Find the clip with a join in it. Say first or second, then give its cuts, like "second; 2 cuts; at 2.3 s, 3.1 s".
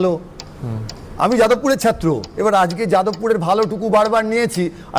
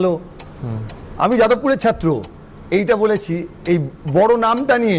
first; 1 cut; at 2.3 s